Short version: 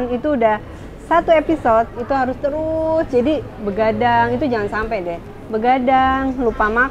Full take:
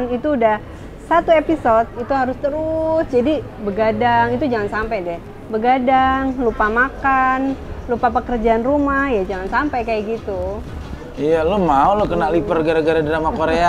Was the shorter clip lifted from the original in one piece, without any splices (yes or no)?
yes